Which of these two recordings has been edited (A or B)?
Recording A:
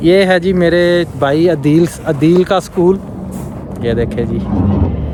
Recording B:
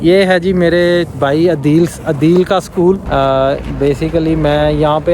B